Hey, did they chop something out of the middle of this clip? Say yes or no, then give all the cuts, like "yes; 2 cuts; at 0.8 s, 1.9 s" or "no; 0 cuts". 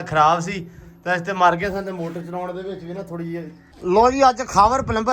yes; 1 cut; at 3.7 s